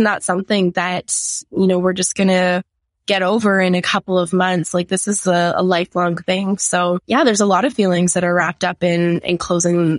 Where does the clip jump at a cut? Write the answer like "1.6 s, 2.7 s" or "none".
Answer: 7.0 s